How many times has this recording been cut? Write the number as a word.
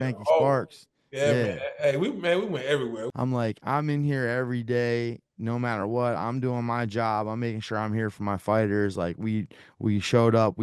one